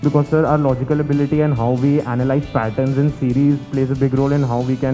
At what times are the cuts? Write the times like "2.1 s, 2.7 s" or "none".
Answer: none